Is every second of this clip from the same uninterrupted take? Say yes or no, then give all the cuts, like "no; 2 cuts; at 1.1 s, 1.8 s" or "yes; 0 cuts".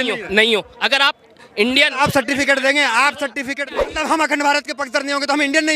no; 1 cut; at 3.9 s